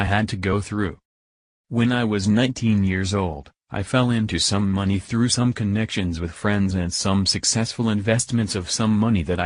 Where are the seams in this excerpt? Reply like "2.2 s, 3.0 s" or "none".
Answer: 4.6 s

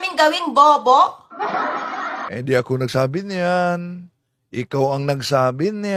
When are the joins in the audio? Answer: none

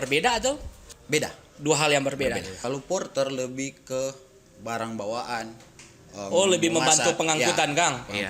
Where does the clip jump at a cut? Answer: 2.5 s

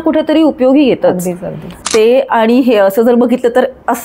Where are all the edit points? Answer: 1.7 s

